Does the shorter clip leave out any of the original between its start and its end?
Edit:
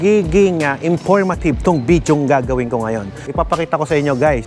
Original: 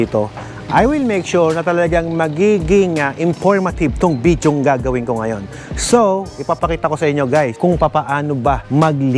yes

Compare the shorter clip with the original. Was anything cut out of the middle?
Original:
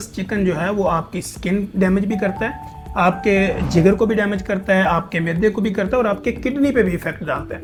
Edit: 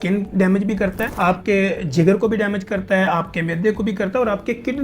yes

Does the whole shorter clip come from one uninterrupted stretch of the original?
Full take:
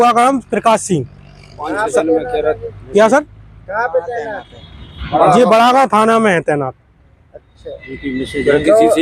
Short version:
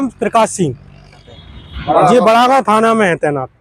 no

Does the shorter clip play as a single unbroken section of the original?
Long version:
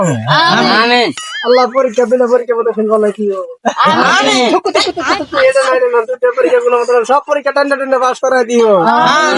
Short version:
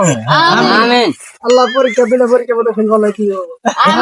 yes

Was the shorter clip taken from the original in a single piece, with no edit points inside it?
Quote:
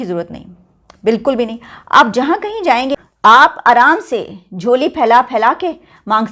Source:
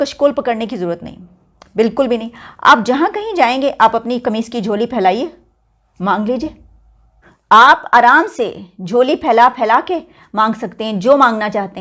no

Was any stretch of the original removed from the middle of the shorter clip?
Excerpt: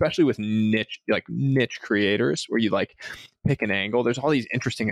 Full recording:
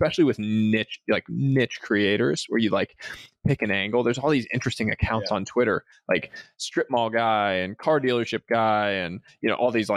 no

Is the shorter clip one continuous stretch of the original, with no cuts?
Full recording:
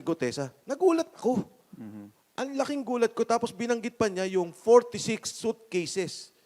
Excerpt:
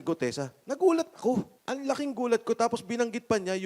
no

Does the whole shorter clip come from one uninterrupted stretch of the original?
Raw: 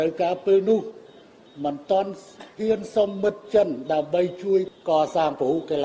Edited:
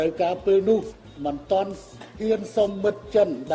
no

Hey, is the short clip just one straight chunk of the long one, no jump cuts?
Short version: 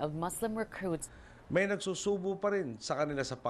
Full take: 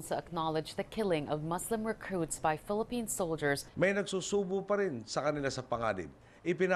no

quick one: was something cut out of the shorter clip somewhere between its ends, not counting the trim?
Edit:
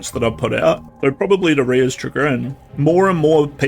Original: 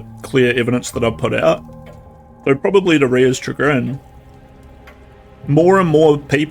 yes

